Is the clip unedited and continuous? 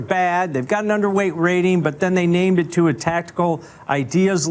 yes; 0 cuts

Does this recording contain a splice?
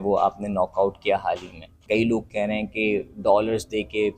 yes; 1 cut; at 1.8 s

